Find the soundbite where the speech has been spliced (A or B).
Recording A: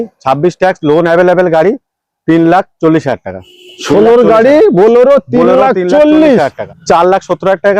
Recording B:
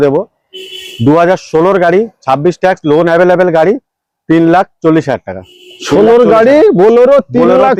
A